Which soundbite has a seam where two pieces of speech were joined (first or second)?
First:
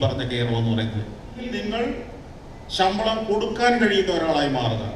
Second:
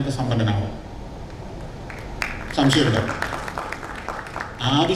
first